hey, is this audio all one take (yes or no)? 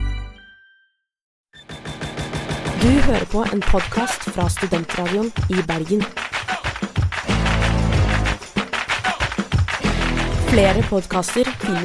no